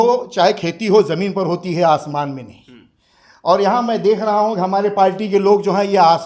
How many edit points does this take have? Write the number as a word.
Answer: zero